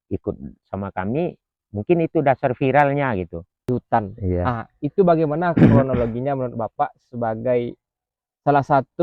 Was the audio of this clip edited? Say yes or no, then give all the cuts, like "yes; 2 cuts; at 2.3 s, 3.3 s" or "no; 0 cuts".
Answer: yes; 1 cut; at 3.7 s